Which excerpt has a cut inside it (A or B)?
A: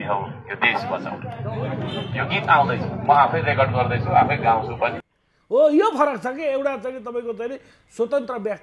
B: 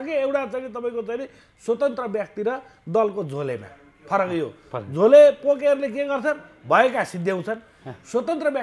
A